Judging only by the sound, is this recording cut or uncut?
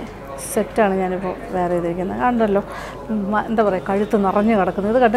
uncut